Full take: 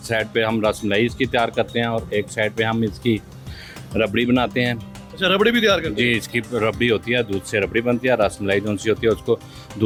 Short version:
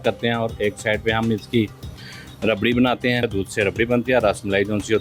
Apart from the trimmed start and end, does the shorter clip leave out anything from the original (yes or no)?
yes